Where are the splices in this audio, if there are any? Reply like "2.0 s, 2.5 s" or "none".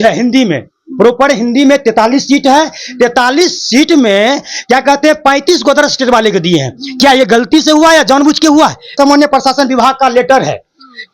8.9 s